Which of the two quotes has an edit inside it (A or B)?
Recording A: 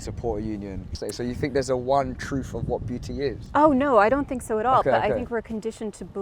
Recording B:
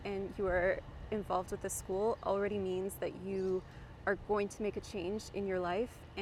A